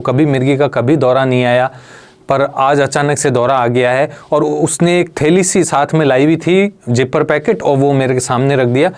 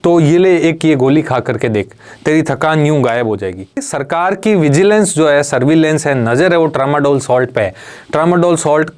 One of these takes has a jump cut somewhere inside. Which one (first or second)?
second